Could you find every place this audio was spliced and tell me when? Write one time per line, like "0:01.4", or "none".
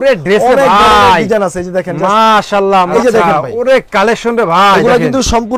0:02.9

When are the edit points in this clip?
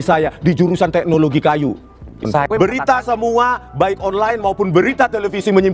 0:02.0

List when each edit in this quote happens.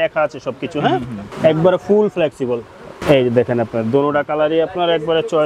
0:01.2
0:02.9

